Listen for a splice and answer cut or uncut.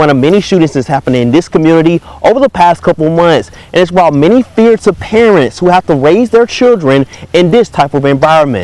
uncut